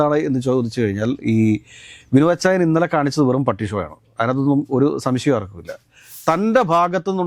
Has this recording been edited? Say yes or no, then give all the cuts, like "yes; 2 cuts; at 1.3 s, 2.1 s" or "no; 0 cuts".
yes; 1 cut; at 6.0 s